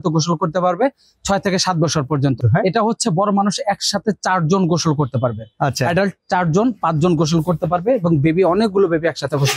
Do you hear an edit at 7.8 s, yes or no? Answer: no